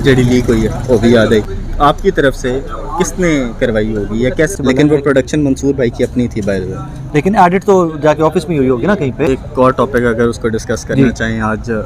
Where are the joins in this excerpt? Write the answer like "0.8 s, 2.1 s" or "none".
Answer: 1.5 s, 4.5 s, 9.3 s